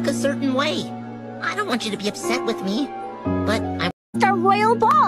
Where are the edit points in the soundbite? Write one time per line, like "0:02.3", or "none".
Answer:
0:04.1